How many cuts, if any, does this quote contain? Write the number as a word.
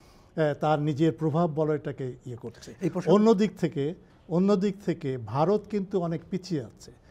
zero